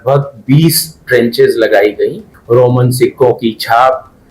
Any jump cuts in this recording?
yes; 1 cut; at 2.3 s

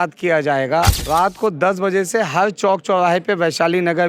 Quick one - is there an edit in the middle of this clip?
yes; 1 cut; at 0.9 s

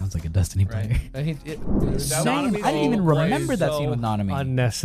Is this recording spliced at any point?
yes; 1 cut; at 1.8 s

